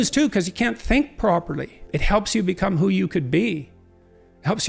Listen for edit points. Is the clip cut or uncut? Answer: cut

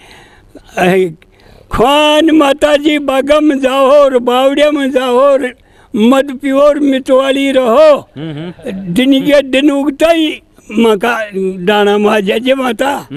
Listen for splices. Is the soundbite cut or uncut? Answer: uncut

